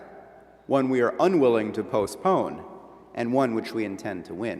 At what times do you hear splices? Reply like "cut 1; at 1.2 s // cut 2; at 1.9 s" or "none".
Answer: cut 1; at 2.3 s